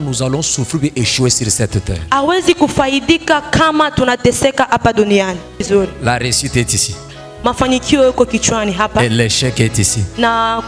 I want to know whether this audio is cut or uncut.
cut